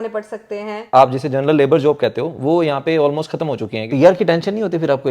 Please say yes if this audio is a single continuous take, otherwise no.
no